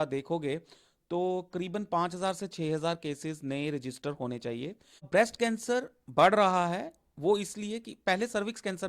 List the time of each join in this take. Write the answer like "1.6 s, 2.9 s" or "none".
5.1 s